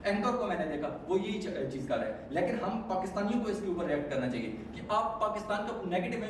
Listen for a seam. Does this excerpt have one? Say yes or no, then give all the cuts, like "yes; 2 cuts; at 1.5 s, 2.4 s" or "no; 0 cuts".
no; 0 cuts